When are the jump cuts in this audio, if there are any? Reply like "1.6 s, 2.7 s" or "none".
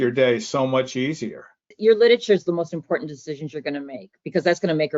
1.7 s